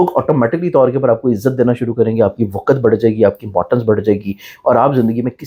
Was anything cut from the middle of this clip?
no; 0 cuts

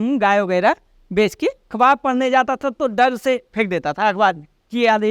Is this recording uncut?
no; 1 cut; at 1.7 s

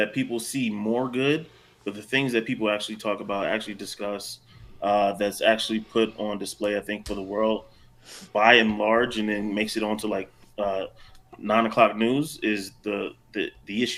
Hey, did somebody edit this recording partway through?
no; 0 cuts

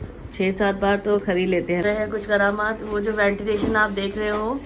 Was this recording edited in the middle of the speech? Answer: yes; 1 cut; at 1.8 s

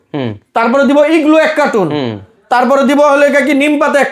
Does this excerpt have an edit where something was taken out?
no; 0 cuts

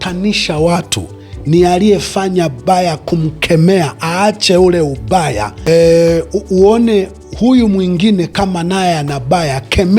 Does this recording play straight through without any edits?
no; 1 cut; at 5.5 s

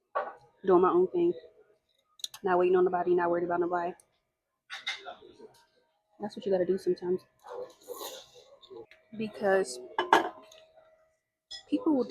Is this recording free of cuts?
no; 1 cut; at 9.0 s

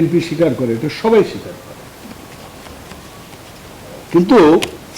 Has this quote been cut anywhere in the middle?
no; 0 cuts

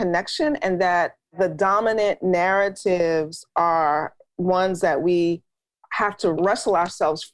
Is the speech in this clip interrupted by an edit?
yes; 2 cuts; at 1.3 s, 6.4 s

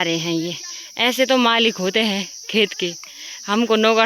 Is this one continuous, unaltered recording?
yes; 0 cuts

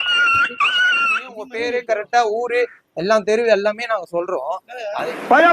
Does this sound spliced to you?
yes; 1 cut; at 1.5 s

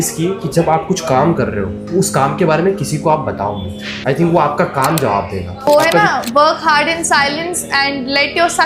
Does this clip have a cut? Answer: no; 0 cuts

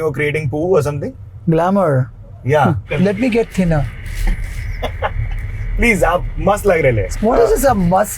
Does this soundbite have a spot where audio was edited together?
yes; 2 cuts; at 2.9 s, 7.0 s

